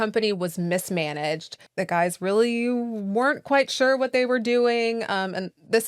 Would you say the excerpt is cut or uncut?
cut